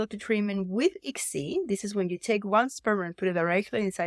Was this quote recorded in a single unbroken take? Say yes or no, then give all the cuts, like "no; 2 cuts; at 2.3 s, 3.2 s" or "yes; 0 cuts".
yes; 0 cuts